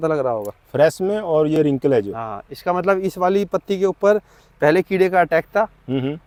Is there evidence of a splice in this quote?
no; 0 cuts

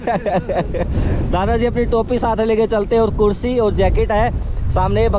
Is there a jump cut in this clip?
no; 0 cuts

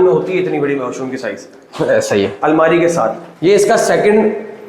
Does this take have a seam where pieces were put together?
yes; 1 cut; at 3.3 s

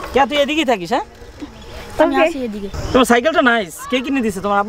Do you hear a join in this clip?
yes; 1 cut; at 2.8 s

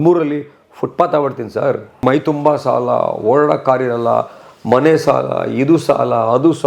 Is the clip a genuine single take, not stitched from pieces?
no; 1 cut; at 2.0 s

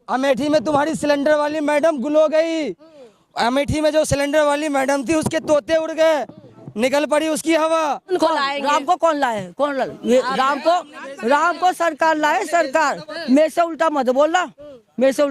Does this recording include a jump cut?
yes; 1 cut; at 8.0 s

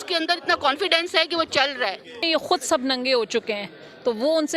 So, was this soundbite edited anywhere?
yes; 1 cut; at 2.2 s

